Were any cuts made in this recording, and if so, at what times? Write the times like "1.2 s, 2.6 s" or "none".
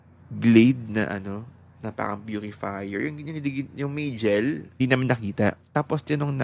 4.8 s, 5.6 s